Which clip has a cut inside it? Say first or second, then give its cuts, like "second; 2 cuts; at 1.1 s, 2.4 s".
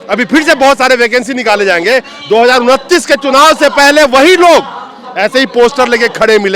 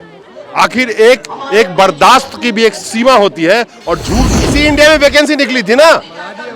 second; 1 cut; at 4.3 s